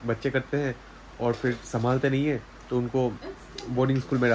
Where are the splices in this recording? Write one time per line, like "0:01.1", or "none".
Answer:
none